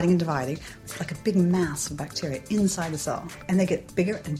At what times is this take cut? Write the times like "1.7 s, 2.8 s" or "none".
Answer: 3.3 s